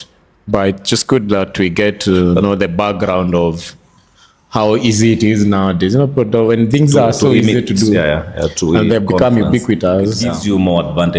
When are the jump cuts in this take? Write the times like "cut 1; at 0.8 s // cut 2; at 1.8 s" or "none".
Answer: cut 1; at 10.3 s